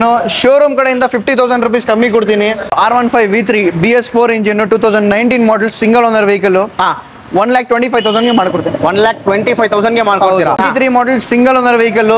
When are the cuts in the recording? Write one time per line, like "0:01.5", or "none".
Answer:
0:02.8
0:10.6